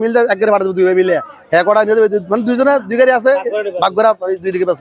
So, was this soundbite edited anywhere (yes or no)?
no